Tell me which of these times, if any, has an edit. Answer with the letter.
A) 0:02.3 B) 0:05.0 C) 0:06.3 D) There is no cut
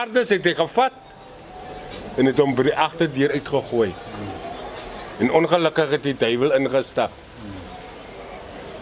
D